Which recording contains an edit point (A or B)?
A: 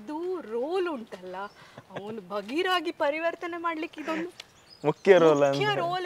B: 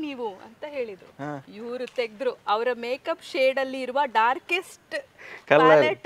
B